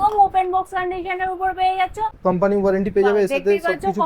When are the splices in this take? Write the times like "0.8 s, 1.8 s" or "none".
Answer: 2.1 s